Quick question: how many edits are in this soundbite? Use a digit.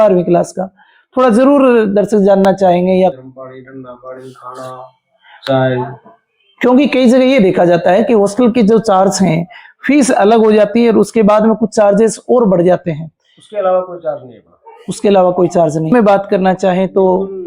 2